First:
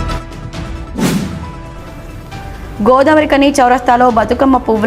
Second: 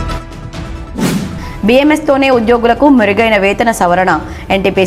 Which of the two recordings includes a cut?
first; 1 cut; at 1.1 s

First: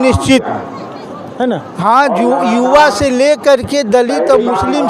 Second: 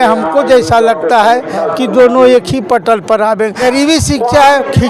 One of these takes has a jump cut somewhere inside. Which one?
second; 1 cut; at 3.7 s

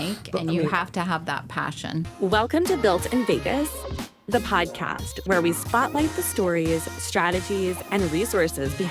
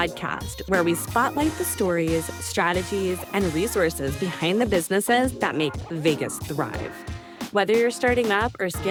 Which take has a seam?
first; 1 cut; at 2.1 s

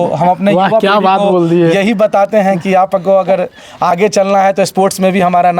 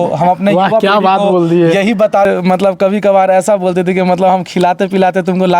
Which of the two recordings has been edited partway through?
second; 1 cut; at 2.3 s

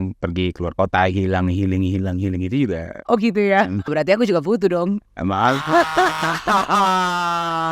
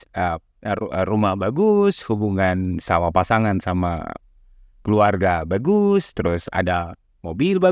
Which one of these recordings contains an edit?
first; 1 cut; at 3.9 s

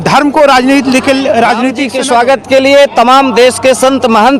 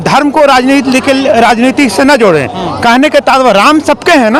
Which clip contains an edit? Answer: first; 1 cut; at 1.8 s

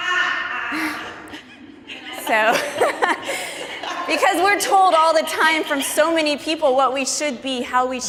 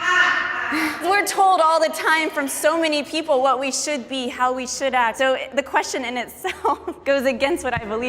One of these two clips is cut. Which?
second; 3 cuts; at 1.0 s, 5.1 s, 6.9 s

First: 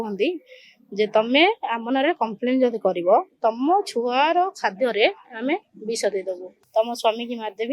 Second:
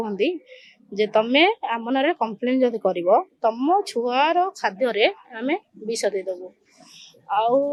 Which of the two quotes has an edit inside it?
first; 1 cut; at 6.5 s

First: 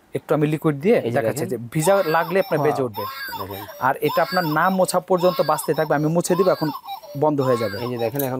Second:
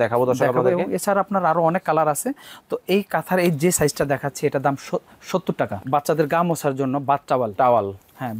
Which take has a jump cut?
second; 1 cut; at 5.8 s

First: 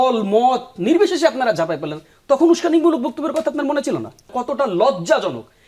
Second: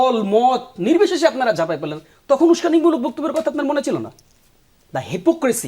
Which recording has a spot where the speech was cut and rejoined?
first; 1 cut; at 4.3 s

